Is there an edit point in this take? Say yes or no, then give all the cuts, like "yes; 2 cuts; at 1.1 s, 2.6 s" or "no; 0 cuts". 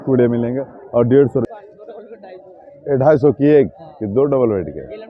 yes; 1 cut; at 1.5 s